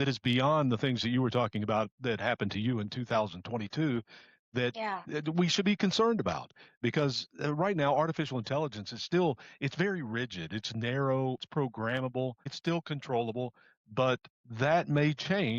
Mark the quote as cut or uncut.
cut